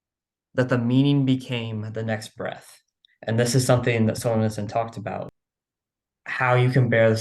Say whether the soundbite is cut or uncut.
cut